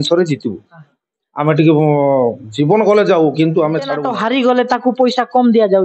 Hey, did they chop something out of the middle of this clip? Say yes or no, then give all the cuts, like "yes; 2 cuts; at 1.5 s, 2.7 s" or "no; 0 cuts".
yes; 1 cut; at 4.0 s